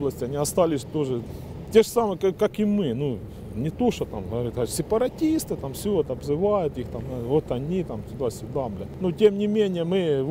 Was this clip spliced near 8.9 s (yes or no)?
yes